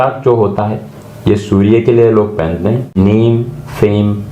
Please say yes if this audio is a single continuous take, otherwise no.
no